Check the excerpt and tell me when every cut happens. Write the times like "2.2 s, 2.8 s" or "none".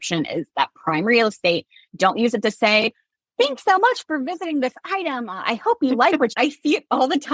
6.3 s